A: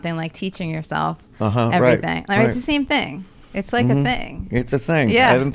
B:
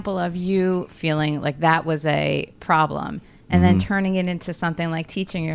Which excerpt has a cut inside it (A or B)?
B